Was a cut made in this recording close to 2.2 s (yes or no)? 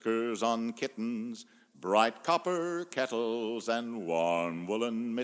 no